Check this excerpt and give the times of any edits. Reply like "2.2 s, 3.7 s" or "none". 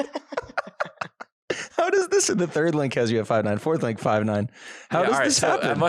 none